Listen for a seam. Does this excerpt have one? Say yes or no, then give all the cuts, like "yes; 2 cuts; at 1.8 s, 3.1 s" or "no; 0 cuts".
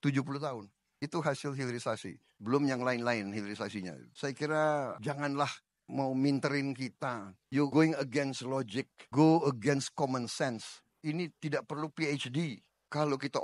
no; 0 cuts